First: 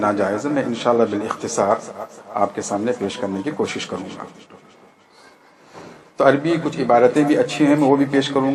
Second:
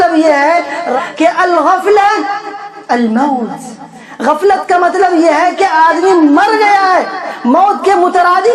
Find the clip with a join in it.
second; 1 cut; at 0.9 s

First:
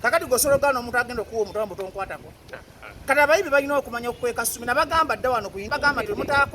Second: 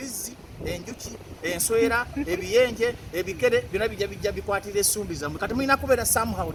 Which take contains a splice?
first; 1 cut; at 5.7 s

